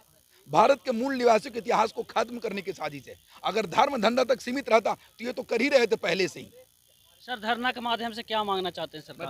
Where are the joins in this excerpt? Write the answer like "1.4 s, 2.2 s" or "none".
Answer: none